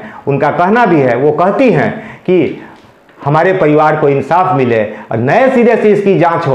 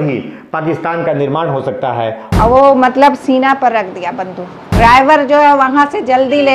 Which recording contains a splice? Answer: second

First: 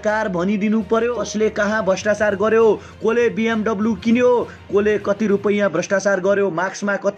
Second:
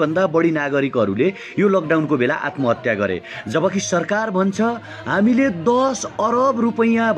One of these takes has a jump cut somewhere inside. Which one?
first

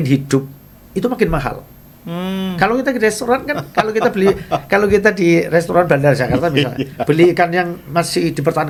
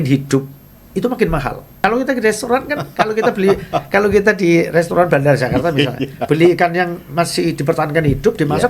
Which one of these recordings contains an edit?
second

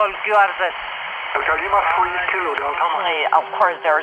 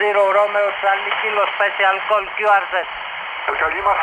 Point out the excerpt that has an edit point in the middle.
first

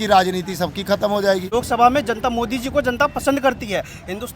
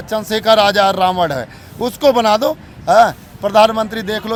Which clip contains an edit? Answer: first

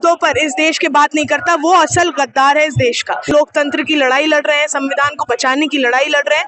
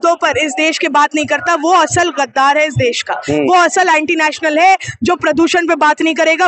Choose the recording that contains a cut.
first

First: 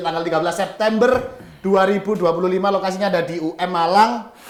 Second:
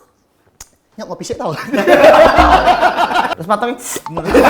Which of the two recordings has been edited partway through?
second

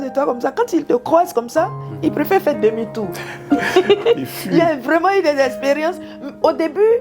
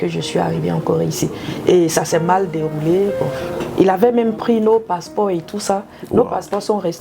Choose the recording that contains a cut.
second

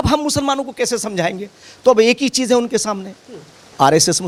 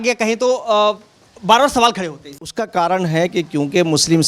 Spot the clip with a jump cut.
second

